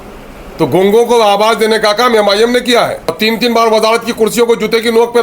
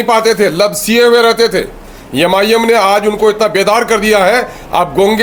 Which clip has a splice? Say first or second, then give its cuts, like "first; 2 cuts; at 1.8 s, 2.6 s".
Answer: first; 1 cut; at 3.1 s